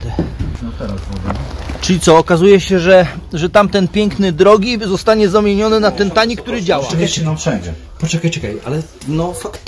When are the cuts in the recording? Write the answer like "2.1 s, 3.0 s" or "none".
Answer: 6.9 s